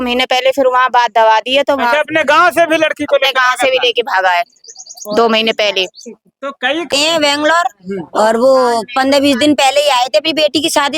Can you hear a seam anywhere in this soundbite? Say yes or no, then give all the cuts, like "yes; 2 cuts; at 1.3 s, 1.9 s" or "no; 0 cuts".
yes; 1 cut; at 6.9 s